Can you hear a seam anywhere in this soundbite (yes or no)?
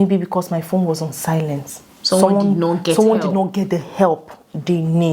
no